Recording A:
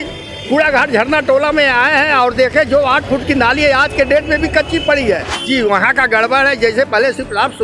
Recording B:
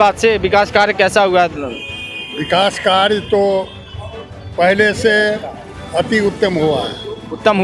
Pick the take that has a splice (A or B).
A